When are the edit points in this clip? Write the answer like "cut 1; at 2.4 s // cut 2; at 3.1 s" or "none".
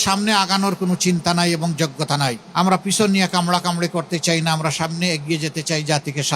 cut 1; at 2.4 s